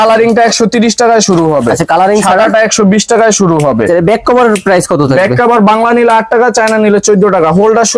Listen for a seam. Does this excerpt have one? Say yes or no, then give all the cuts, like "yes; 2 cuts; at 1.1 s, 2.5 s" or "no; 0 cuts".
no; 0 cuts